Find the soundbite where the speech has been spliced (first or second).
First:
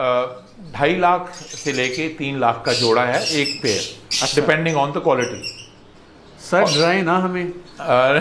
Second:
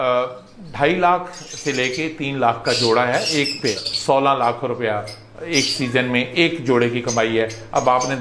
second